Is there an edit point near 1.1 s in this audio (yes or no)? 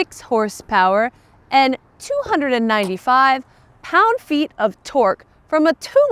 no